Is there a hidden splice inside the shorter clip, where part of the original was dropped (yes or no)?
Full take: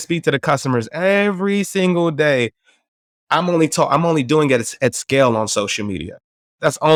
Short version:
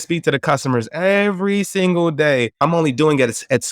yes